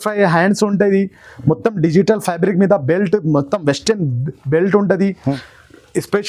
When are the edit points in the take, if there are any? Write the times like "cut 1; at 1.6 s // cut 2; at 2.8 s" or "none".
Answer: cut 1; at 5.3 s

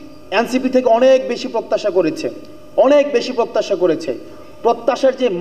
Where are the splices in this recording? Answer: none

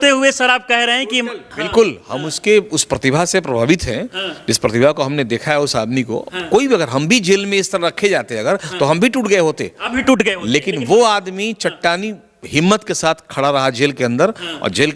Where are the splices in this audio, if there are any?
none

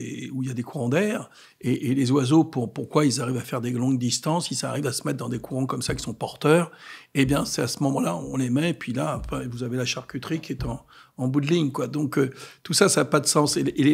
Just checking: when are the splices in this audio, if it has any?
none

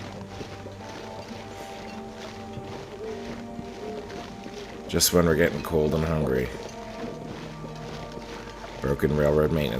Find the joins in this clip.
cut 1; at 4.9 s // cut 2; at 6.5 s // cut 3; at 8.8 s

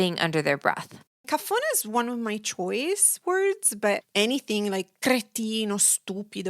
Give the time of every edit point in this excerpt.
cut 1; at 1.3 s

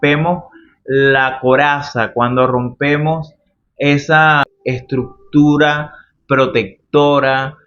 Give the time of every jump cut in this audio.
cut 1; at 4.4 s

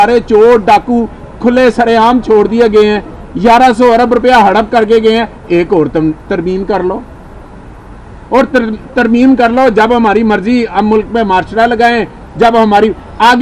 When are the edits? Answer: none

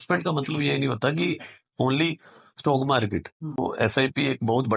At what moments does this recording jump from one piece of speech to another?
cut 1; at 3.6 s

